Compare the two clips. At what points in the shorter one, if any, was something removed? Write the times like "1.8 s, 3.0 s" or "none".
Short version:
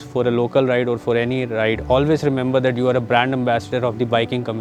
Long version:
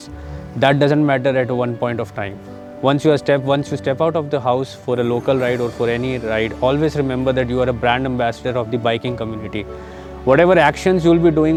none